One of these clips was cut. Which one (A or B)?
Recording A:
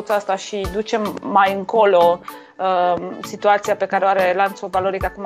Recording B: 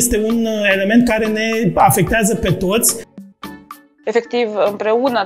B